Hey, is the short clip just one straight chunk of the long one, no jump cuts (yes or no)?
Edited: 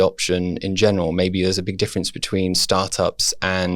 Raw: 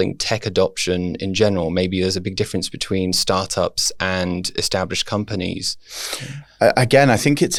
yes